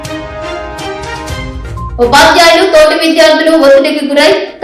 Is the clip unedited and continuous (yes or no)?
no